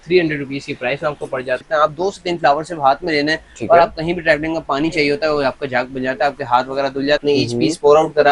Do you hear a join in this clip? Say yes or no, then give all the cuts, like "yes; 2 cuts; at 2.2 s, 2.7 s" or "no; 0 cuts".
yes; 2 cuts; at 1.6 s, 7.2 s